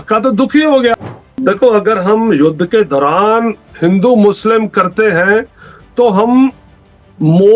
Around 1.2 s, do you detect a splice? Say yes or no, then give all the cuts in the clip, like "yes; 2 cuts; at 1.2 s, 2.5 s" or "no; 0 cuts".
yes; 1 cut; at 1.2 s